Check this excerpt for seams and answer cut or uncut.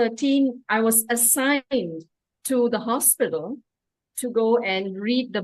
uncut